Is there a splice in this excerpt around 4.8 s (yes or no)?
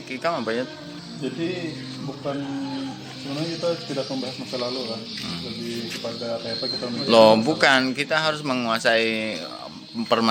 no